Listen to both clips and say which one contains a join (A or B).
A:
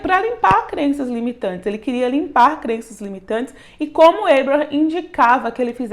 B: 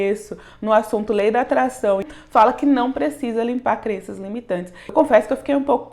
B